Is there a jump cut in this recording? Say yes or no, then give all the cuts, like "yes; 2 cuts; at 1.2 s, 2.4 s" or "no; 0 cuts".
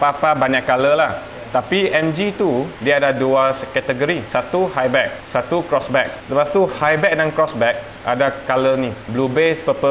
yes; 5 cuts; at 2.7 s, 4.2 s, 5.2 s, 6.2 s, 9.0 s